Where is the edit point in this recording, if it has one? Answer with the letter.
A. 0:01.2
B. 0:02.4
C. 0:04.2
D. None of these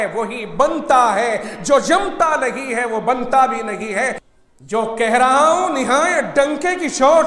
C